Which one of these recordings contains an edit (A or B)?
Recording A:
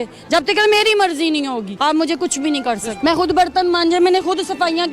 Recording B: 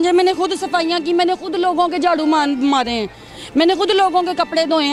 A